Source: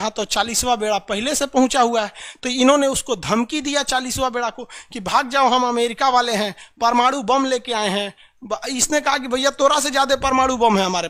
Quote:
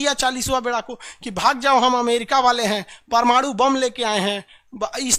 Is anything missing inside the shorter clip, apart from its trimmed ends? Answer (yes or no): no